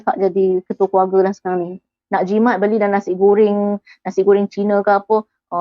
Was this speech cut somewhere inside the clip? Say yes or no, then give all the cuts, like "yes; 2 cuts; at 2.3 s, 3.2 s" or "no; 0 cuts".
yes; 1 cut; at 2.0 s